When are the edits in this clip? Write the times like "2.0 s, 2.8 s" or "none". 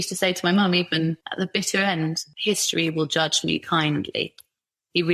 1.2 s, 2.3 s